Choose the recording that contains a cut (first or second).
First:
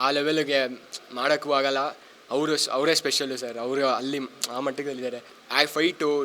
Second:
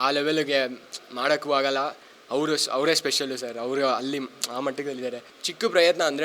second